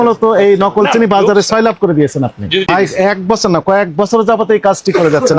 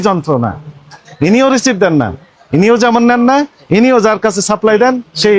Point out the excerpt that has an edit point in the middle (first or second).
first